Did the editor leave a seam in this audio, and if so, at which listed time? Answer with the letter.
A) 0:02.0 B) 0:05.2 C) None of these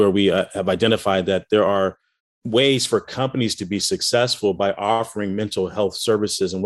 C